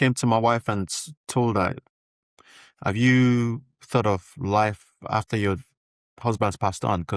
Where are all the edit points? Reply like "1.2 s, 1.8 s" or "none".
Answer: none